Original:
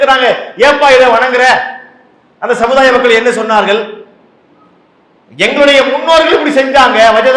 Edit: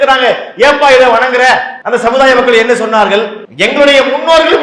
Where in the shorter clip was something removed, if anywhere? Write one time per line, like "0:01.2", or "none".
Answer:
0:01.7
0:03.4